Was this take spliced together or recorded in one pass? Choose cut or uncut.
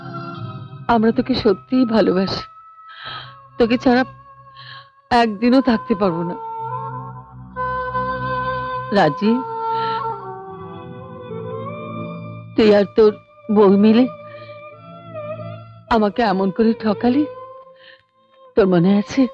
uncut